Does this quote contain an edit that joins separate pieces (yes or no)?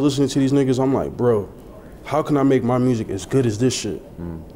no